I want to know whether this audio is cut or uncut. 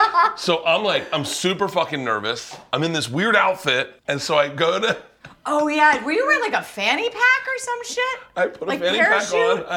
cut